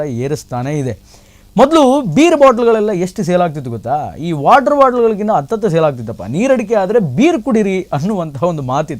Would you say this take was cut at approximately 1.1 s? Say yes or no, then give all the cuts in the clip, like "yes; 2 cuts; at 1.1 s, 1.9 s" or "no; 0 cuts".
no; 0 cuts